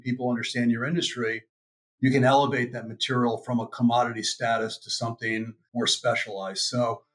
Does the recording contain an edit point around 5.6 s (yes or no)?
yes